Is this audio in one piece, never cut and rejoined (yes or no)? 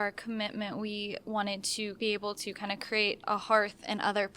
no